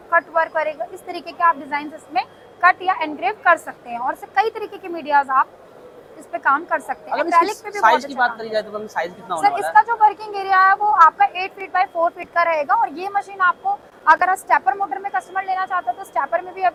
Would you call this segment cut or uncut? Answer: uncut